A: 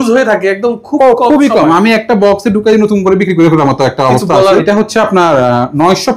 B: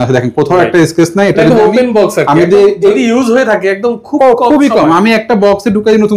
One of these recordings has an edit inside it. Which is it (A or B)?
A